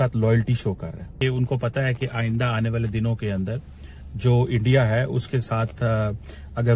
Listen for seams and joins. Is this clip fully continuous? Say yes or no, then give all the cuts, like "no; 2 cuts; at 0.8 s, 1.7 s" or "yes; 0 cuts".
no; 1 cut; at 1.1 s